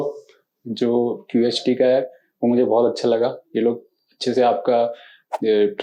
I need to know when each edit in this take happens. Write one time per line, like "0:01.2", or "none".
none